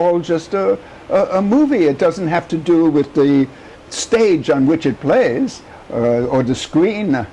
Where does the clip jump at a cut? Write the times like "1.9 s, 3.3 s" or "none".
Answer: none